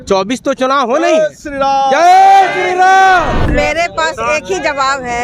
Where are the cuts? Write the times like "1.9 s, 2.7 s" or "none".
3.4 s